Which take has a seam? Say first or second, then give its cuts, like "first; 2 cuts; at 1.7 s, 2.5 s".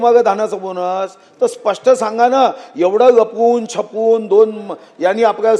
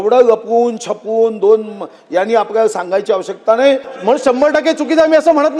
second; 1 cut; at 3.9 s